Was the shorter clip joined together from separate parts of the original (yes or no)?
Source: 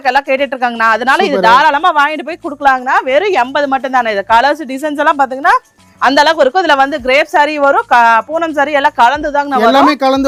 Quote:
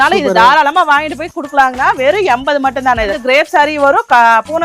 yes